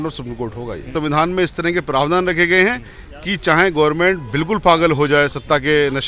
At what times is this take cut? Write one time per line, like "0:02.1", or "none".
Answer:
0:00.9